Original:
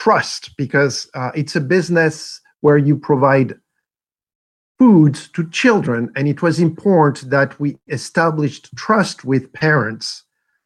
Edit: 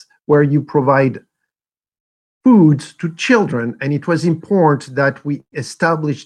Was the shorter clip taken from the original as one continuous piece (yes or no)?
yes